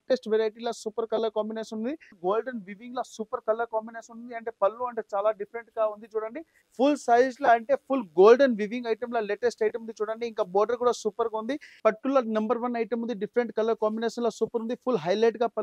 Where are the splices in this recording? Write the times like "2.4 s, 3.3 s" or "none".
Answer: 2.1 s, 6.6 s, 11.8 s